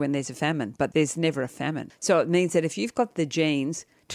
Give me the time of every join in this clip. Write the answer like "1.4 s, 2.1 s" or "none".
0.9 s, 1.9 s